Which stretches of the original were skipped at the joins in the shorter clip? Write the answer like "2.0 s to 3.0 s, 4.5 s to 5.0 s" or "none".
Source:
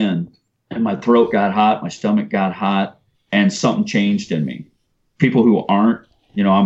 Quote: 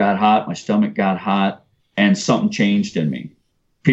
none